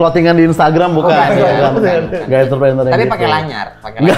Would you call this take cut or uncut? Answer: uncut